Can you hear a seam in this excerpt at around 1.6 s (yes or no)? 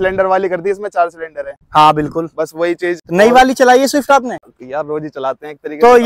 no